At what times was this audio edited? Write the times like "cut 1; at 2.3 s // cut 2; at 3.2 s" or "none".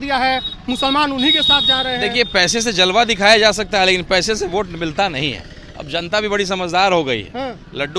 none